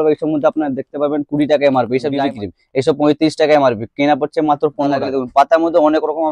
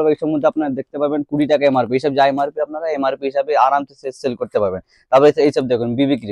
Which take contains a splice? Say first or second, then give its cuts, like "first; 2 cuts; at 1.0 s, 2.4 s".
first; 2 cuts; at 2.1 s, 5.0 s